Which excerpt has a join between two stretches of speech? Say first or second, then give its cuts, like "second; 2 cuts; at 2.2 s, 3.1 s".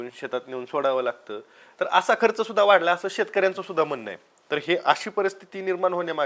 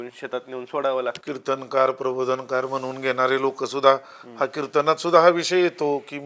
second; 1 cut; at 1.2 s